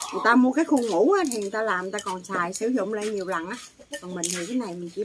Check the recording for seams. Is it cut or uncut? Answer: uncut